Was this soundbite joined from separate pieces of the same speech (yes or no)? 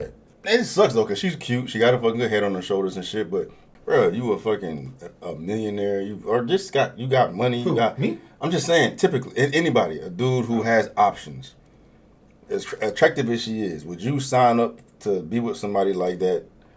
yes